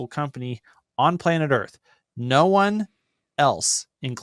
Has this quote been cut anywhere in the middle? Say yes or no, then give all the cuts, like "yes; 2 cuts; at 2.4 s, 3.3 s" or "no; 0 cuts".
no; 0 cuts